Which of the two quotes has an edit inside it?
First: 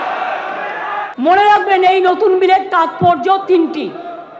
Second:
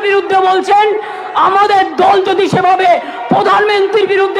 first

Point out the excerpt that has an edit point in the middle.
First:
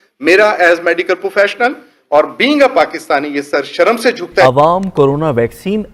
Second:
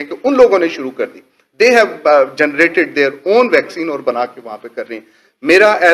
first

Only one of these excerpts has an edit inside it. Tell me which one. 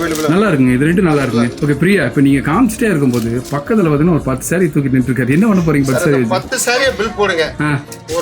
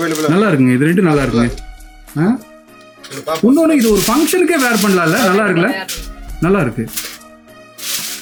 first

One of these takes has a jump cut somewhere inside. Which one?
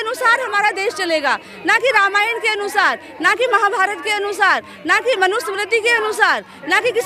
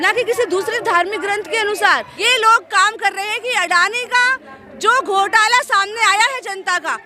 second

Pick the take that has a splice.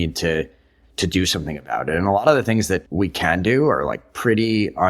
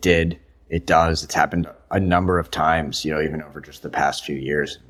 first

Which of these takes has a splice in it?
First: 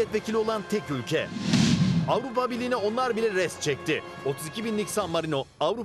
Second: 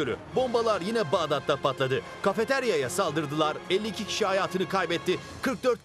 first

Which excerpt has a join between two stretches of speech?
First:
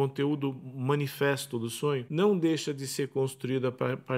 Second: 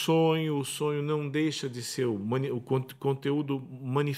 first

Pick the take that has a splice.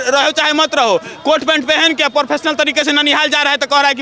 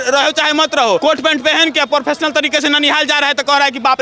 second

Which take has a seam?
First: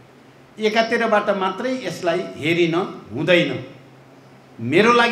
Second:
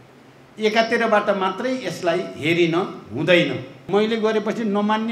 second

